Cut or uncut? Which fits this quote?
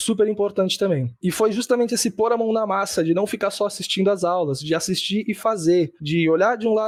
uncut